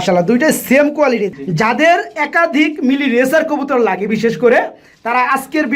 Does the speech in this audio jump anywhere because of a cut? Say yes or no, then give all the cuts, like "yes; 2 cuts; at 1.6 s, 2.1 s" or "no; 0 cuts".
yes; 1 cut; at 1.3 s